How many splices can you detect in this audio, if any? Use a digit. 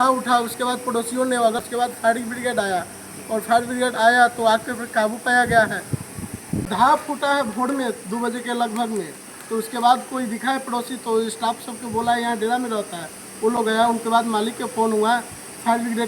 2